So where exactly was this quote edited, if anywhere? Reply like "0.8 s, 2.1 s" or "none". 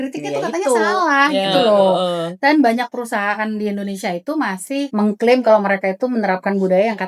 4.9 s